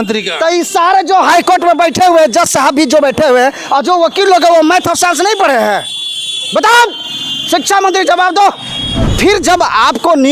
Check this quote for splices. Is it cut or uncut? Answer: cut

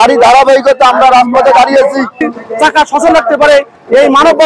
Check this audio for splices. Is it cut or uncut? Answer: cut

